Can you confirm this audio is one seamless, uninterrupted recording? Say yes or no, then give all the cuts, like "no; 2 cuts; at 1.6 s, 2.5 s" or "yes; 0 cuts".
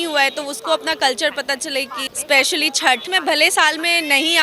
no; 2 cuts; at 2.0 s, 3.1 s